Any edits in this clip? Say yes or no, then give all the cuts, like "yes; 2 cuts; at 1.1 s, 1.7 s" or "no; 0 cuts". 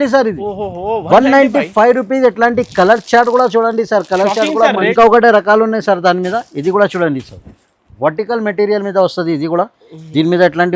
yes; 1 cut; at 4.5 s